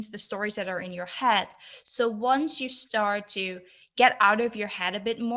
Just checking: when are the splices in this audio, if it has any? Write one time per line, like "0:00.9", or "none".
none